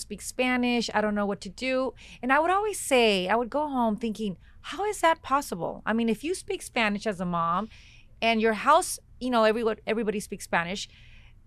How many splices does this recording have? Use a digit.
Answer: 0